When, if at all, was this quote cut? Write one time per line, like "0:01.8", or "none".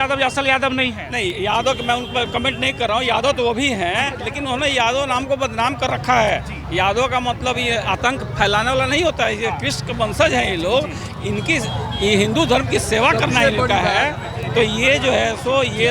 none